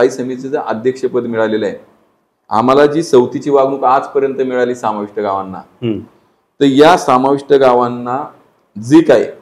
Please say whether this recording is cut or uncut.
uncut